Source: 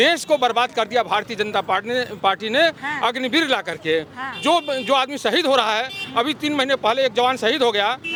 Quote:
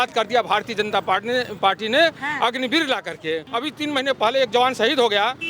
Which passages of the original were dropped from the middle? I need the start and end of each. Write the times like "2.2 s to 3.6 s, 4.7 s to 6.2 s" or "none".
4.1 s to 6.1 s